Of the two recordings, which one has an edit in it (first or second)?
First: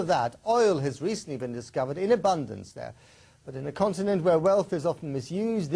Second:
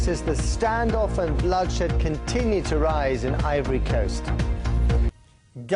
first